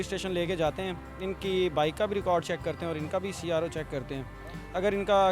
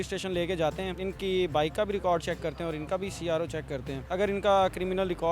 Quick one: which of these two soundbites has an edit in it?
second; 2 cuts; at 0.9 s, 4.0 s

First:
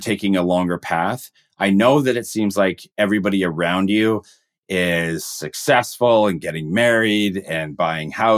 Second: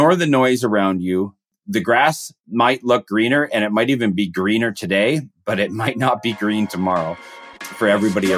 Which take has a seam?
second; 2 cuts; at 1.5 s, 7.4 s

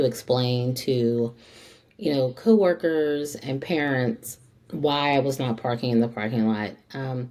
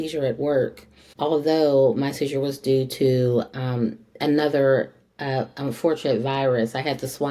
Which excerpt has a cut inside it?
second; 1 cut; at 1.1 s

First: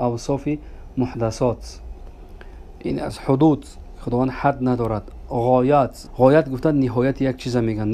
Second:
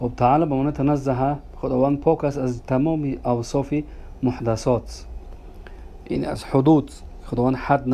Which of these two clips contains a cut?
first; 1 cut; at 6.0 s

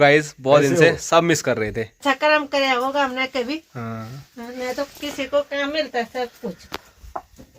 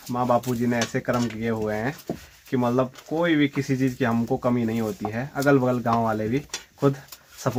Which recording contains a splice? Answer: first; 1 cut; at 1.9 s

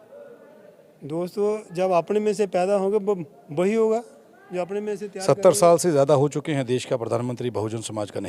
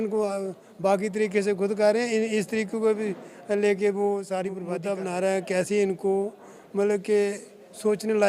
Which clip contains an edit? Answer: second; 1 cut; at 4.7 s

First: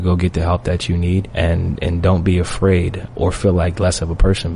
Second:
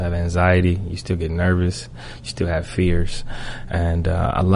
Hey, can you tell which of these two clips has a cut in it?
first; 2 cuts; at 1.3 s, 3.0 s

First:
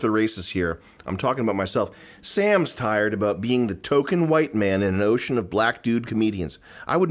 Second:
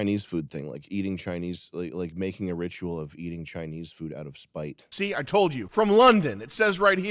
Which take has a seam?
second; 2 cuts; at 4.8 s, 5.6 s

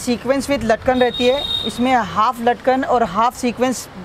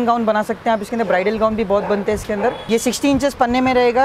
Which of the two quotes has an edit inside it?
second; 1 cut; at 2.6 s

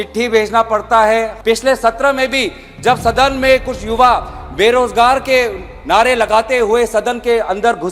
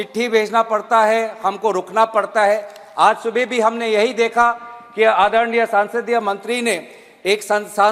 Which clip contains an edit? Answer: first; 1 cut; at 1.3 s

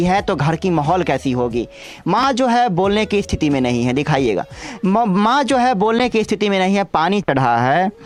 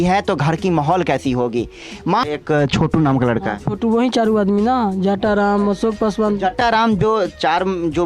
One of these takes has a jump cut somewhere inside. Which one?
second; 1 cut; at 2.2 s

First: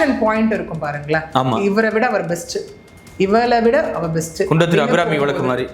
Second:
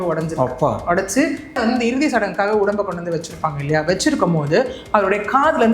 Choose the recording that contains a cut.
second; 1 cut; at 1.6 s

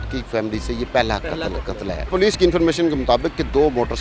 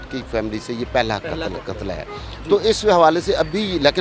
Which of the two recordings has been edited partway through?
first; 1 cut; at 2.1 s

